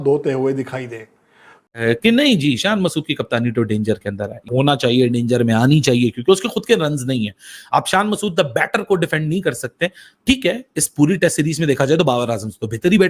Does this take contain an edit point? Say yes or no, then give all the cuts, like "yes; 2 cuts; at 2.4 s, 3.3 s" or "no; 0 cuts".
yes; 1 cut; at 1.7 s